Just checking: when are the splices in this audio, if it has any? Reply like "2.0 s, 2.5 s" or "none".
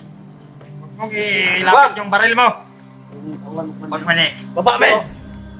0.9 s